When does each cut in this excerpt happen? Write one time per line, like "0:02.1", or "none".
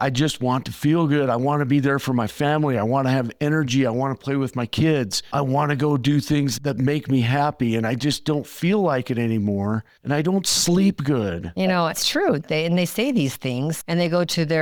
none